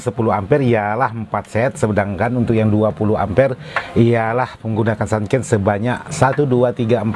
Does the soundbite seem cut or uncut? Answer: uncut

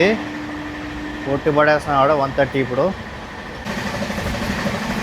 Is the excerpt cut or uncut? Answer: cut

